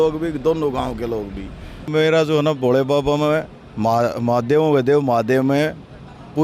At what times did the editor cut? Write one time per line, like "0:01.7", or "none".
0:01.9